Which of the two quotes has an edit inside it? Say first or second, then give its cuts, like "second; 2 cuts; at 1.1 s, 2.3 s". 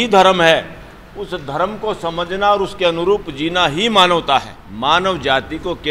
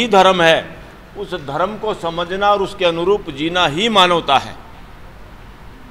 first; 1 cut; at 4.6 s